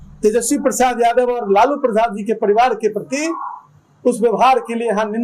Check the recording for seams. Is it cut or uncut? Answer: uncut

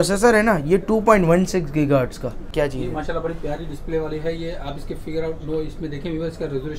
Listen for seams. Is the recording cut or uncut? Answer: cut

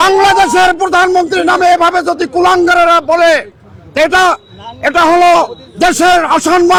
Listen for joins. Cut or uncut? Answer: uncut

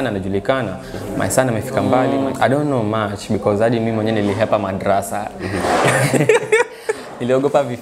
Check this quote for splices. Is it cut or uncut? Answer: cut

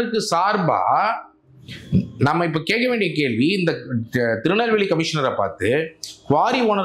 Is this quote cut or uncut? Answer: uncut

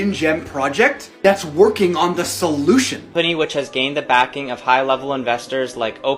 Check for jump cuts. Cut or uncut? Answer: cut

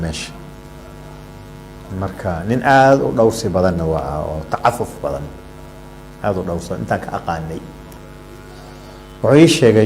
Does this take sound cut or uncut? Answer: cut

